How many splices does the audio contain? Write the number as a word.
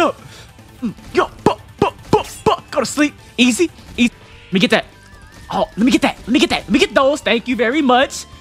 one